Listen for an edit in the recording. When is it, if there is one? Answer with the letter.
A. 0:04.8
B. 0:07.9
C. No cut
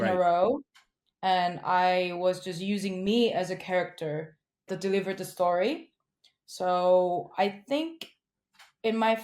A